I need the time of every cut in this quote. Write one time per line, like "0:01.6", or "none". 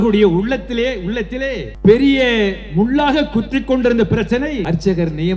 0:01.7
0:04.6